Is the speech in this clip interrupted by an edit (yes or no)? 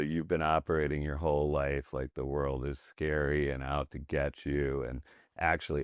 no